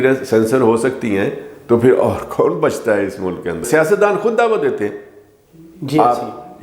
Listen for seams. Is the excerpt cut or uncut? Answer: cut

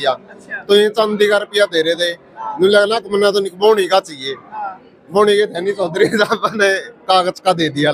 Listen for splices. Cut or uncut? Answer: uncut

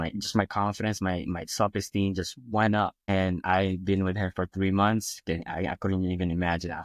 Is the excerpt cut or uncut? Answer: cut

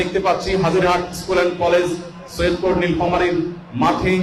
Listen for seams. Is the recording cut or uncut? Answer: uncut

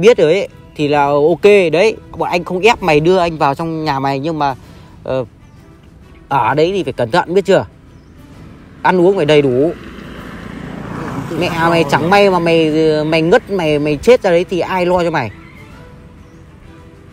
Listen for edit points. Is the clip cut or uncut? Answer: uncut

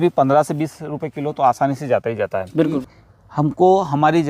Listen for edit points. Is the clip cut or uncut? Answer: cut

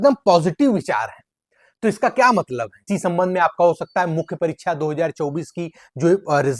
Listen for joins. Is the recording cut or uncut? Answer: cut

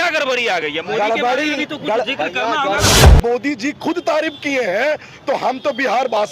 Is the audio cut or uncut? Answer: cut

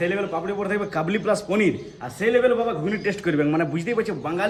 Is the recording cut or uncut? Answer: uncut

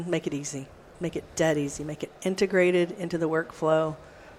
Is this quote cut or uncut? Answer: cut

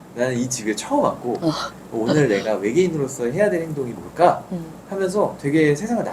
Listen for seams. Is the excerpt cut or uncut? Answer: uncut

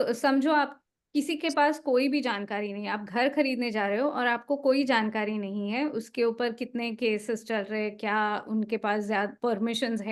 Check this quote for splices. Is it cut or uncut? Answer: uncut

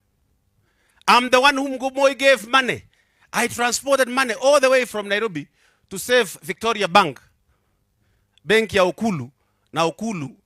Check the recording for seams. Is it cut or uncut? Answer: uncut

